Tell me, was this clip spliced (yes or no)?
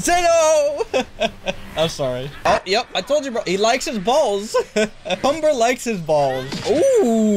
yes